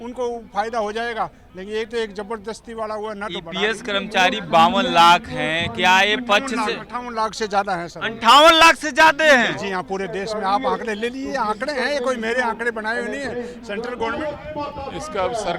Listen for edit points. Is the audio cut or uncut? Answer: cut